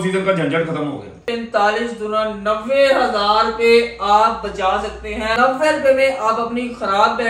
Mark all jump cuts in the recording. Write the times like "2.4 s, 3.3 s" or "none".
1.2 s, 5.3 s